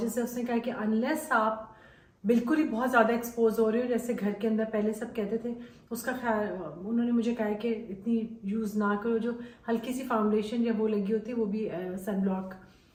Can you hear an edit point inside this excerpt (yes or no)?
no